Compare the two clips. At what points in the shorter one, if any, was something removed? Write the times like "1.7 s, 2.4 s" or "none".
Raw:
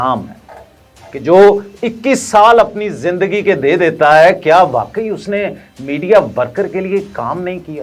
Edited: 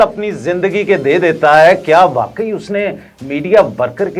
none